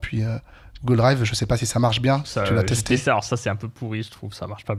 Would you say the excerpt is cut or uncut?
uncut